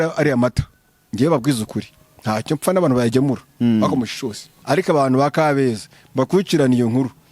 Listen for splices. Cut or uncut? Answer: cut